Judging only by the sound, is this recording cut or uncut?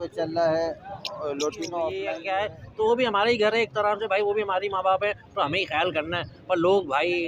cut